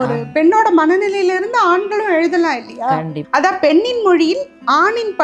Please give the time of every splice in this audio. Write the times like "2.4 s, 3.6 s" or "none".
3.2 s